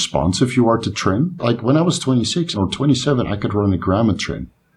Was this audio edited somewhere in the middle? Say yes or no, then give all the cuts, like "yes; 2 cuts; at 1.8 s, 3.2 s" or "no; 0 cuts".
yes; 2 cuts; at 1.4 s, 2.6 s